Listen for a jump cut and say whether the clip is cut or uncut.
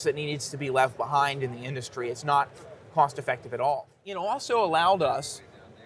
cut